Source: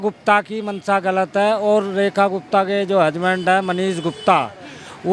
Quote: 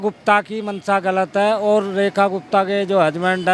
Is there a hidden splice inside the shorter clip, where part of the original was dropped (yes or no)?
no